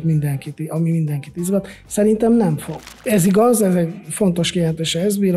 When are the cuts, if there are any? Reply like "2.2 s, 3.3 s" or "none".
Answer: 2.9 s